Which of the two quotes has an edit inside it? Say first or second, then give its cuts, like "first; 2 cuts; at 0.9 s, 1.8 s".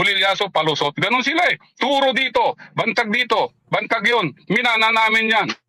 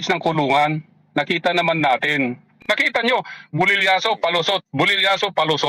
second; 1 cut; at 2.6 s